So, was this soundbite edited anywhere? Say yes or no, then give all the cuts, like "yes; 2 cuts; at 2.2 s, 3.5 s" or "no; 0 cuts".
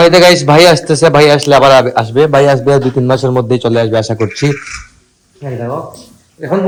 no; 0 cuts